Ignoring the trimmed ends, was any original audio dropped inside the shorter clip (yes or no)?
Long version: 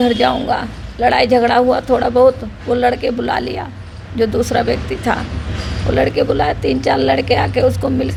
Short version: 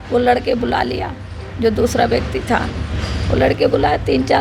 no